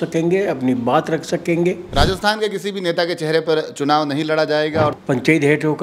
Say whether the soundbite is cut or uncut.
cut